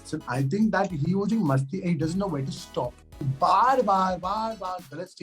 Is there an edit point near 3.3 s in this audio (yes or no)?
yes